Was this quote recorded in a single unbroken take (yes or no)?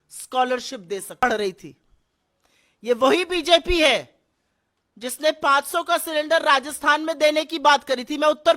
no